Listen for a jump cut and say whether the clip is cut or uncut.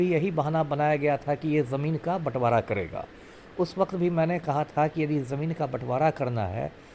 uncut